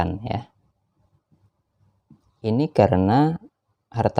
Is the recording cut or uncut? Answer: cut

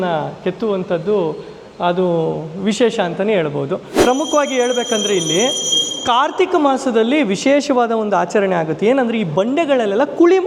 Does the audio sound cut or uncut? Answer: cut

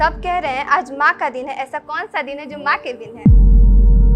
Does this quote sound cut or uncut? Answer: cut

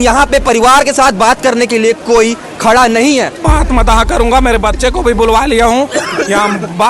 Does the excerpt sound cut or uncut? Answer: cut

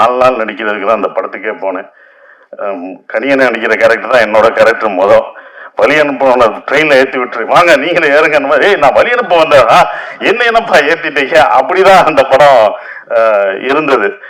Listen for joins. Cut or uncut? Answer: uncut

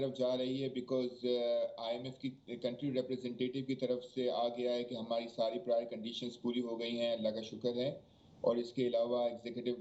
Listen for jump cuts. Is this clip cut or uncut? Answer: uncut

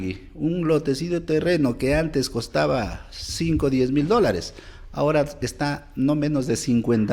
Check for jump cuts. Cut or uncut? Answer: uncut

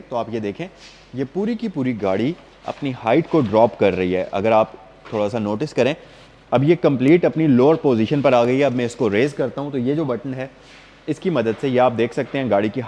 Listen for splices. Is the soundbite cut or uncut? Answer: uncut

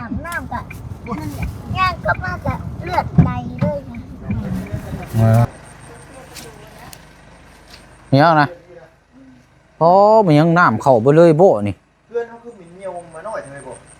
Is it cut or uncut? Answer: cut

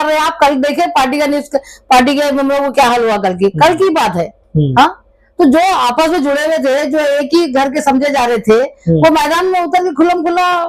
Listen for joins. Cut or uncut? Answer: uncut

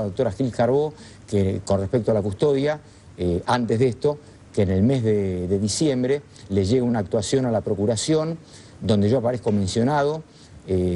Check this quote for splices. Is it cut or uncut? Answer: uncut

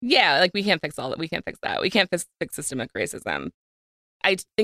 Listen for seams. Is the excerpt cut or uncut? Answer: uncut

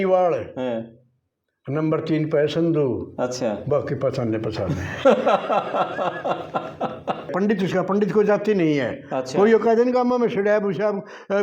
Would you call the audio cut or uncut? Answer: cut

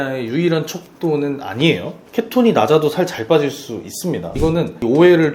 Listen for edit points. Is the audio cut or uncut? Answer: cut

